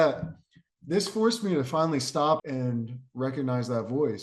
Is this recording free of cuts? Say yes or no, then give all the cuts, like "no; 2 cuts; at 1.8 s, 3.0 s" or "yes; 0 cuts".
no; 1 cut; at 2.4 s